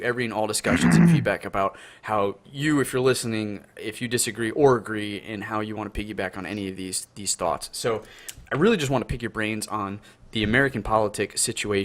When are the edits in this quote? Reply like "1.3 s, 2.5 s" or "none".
6.3 s